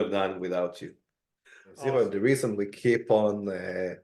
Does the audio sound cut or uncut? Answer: cut